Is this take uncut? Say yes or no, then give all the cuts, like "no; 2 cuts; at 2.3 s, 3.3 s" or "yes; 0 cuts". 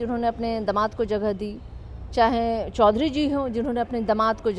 yes; 0 cuts